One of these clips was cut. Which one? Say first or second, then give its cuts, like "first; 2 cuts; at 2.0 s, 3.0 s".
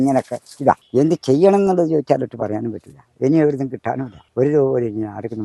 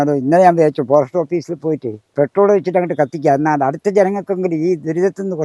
first; 2 cuts; at 0.8 s, 4.2 s